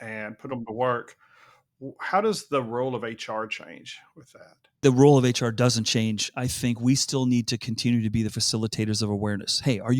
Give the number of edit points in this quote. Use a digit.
1